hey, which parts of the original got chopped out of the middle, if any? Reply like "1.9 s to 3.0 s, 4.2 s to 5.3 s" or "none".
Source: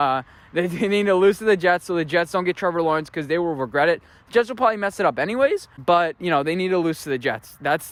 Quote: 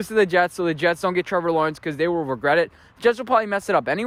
none